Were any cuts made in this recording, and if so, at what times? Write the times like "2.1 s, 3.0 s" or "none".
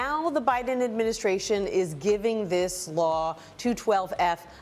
none